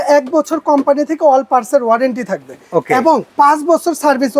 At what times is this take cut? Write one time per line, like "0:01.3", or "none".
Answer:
0:03.3

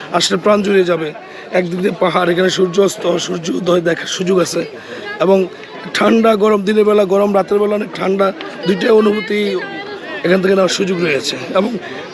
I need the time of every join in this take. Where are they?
none

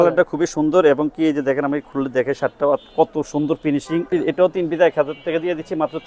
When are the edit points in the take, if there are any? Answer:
0:04.1

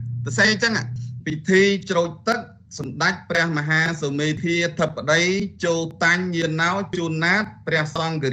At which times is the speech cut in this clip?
0:01.2

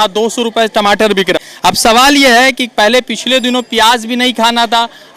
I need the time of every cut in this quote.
0:01.4

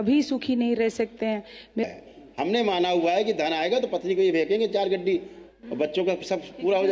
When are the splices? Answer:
0:01.8

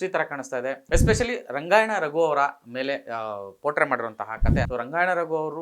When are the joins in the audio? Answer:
0:04.7

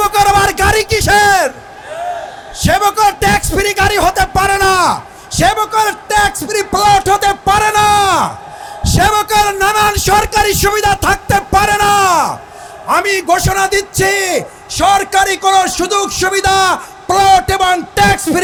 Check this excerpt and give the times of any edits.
none

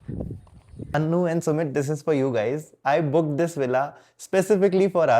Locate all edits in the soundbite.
0:00.9

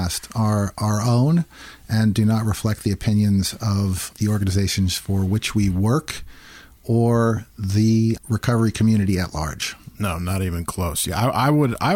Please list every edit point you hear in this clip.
0:04.1
0:08.2

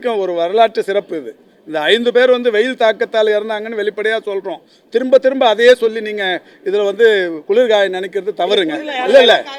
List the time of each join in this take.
none

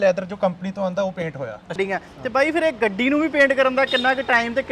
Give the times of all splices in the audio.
0:01.7

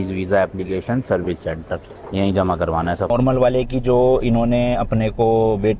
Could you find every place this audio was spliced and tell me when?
0:03.1

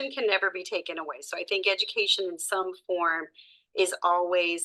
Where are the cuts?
none

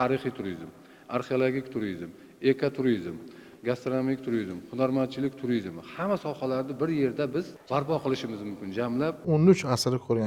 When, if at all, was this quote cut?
0:09.2

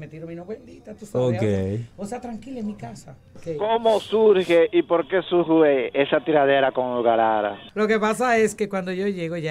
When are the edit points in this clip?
0:03.3
0:07.6

